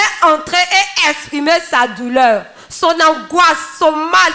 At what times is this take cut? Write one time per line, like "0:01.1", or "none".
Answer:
none